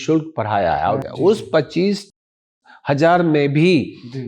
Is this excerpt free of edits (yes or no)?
no